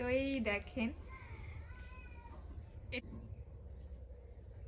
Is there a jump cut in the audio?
yes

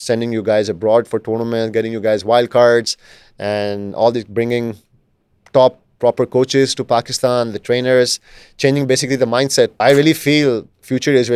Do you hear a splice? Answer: yes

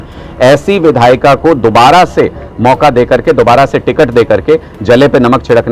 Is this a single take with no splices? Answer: yes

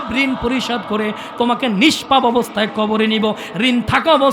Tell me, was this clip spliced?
no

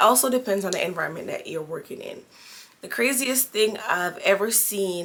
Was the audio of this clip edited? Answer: no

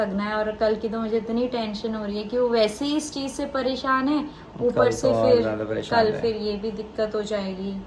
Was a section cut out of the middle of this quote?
no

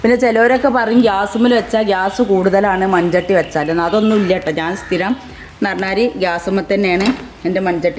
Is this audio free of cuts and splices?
yes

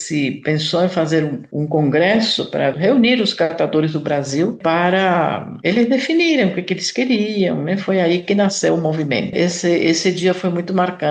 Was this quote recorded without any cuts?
no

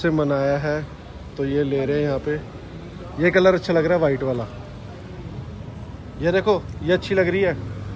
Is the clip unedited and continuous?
yes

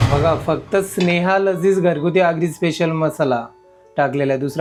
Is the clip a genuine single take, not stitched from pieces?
yes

